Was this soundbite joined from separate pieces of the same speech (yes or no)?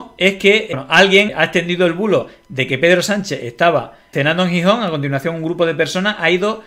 yes